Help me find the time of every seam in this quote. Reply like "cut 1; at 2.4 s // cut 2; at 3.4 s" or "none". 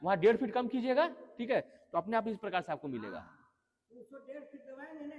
none